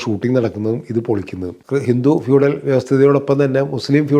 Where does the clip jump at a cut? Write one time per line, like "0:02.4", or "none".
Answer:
0:01.5

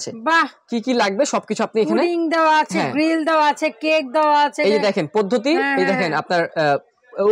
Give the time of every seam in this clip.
none

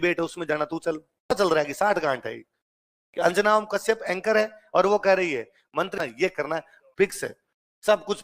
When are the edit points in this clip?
0:01.3
0:05.9

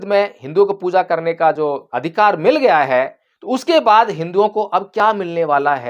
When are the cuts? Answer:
0:01.9

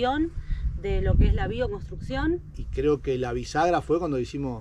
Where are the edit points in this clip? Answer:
0:02.6

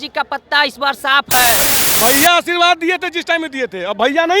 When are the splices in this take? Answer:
0:01.8

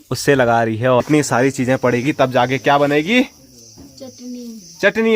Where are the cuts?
0:01.0

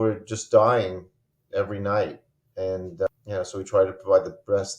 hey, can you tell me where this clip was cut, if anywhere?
0:03.1

